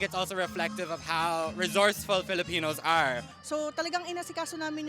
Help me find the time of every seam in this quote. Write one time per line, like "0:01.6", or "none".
0:03.3